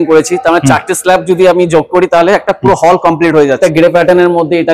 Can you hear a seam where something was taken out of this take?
yes; 1 cut; at 3.6 s

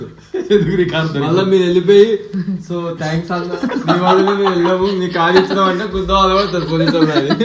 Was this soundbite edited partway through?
no; 0 cuts

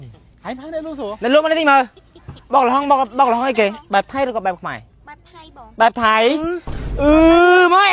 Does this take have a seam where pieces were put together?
no; 0 cuts

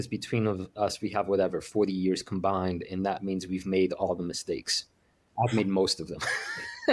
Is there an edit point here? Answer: no; 0 cuts

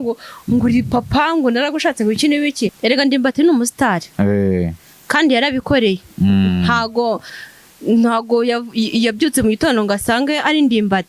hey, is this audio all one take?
no; 1 cut; at 2.7 s

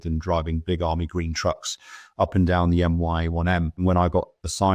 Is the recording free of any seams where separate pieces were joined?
no; 1 cut; at 3.8 s

